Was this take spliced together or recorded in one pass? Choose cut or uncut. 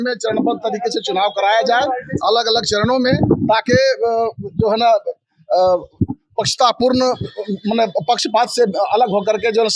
uncut